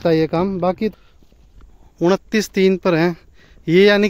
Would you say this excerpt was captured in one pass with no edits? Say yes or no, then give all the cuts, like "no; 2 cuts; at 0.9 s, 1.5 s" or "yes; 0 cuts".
no; 1 cut; at 0.9 s